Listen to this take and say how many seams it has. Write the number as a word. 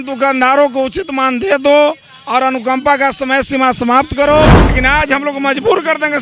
one